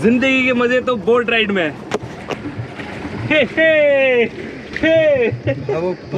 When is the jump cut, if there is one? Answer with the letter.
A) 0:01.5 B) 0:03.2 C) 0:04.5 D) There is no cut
C